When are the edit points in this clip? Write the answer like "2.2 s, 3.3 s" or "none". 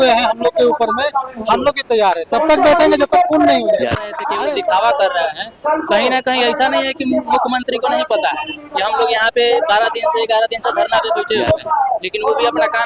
4.2 s